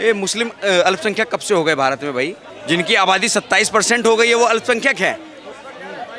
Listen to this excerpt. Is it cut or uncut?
cut